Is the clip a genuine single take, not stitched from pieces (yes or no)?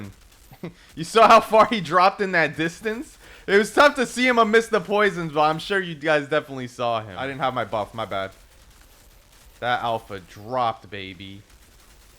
no